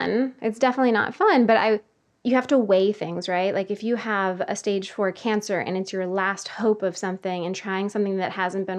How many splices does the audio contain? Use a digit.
1